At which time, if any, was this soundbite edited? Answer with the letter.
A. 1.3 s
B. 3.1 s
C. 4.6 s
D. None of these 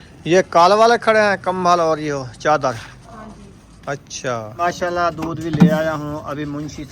C